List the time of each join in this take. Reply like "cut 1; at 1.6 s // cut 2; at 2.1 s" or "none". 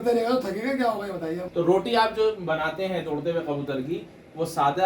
cut 1; at 1.4 s